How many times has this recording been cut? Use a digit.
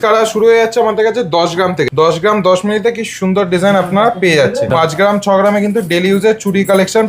2